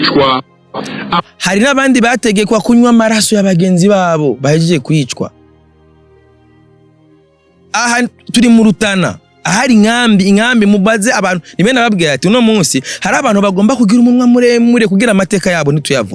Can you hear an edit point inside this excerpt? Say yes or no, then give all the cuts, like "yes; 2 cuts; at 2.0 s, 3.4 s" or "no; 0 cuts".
no; 0 cuts